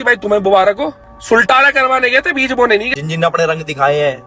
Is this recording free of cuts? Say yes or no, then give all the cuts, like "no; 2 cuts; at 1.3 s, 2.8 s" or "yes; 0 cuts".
no; 2 cuts; at 1.1 s, 2.9 s